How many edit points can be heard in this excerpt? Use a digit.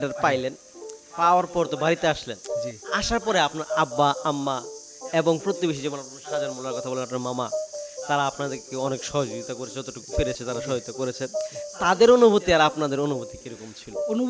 0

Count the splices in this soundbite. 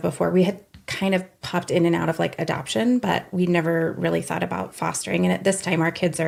0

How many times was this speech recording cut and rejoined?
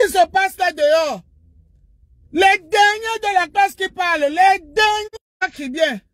1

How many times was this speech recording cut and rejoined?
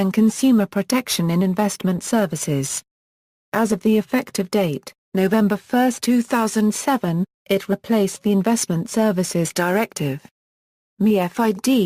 1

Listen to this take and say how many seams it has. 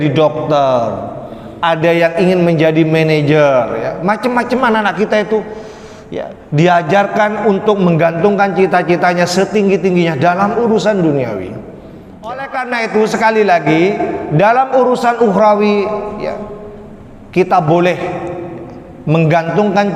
1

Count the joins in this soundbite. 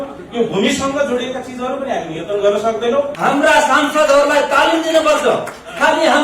1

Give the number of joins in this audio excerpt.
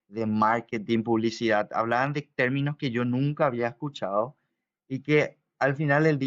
0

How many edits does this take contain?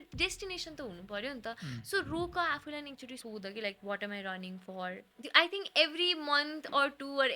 2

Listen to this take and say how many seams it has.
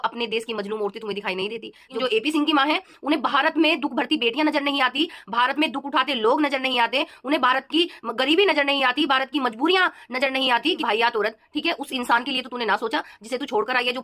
2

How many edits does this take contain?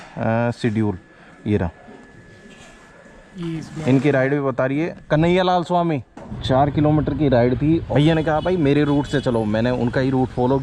2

